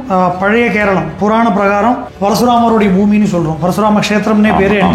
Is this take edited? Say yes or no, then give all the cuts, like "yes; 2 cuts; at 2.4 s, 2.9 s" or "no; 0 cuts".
yes; 1 cut; at 2.1 s